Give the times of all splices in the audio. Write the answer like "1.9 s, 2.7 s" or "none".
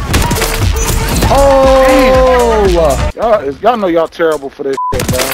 3.1 s